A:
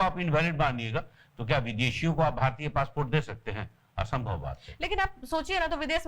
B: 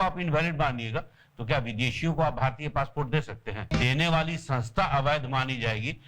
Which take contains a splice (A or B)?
B